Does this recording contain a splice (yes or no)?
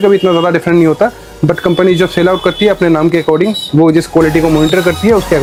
no